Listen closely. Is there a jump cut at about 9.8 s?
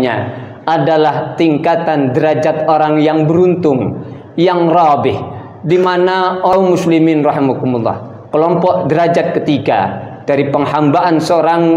no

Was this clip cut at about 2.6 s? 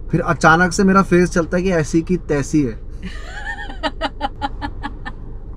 no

